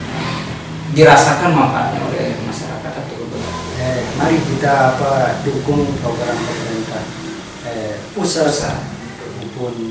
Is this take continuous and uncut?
no; 1 cut; at 3.4 s

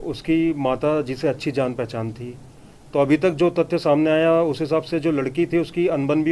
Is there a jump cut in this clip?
no; 0 cuts

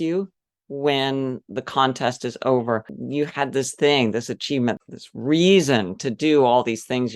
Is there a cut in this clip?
yes; 2 cuts; at 3.0 s, 4.8 s

